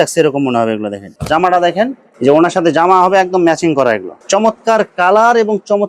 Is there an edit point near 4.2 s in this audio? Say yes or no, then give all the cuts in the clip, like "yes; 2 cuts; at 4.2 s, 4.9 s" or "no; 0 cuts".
yes; 2 cuts; at 1.1 s, 4.2 s